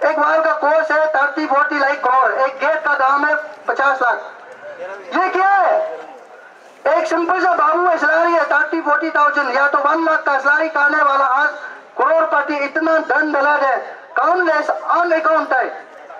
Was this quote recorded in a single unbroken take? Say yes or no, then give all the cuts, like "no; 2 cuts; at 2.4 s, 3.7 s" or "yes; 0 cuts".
yes; 0 cuts